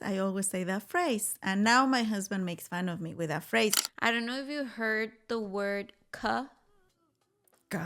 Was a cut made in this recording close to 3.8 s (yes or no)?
yes